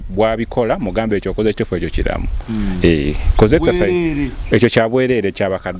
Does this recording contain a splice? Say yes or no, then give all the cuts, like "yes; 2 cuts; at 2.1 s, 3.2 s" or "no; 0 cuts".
no; 0 cuts